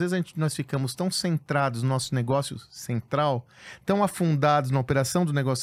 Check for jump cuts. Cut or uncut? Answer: uncut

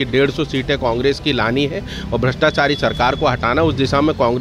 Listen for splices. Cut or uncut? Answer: uncut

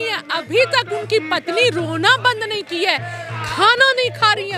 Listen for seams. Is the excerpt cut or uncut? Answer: uncut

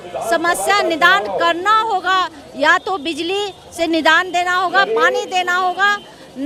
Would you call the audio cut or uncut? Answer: uncut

